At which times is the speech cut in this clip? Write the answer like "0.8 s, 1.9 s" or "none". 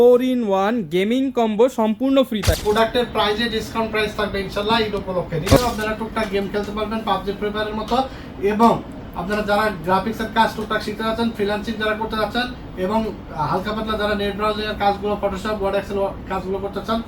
2.5 s, 5.6 s